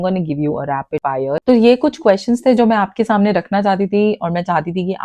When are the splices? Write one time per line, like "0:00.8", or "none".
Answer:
0:01.4